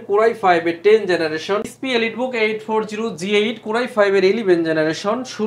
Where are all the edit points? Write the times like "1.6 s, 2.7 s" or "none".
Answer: 1.6 s